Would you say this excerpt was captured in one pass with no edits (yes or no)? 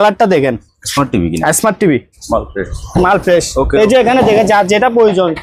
no